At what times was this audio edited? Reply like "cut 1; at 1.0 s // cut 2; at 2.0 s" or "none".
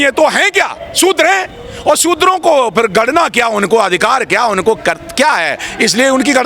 none